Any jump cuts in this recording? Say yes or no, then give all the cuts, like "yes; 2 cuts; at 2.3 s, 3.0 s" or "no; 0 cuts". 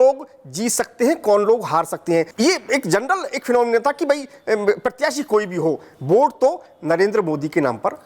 yes; 1 cut; at 2.3 s